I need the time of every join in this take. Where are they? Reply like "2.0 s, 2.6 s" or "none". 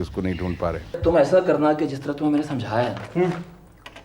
1.0 s